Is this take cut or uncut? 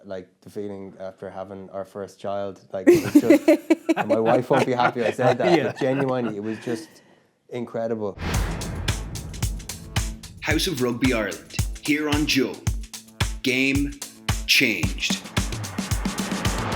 cut